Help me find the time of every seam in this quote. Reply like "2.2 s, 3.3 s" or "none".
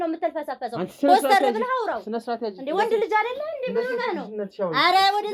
none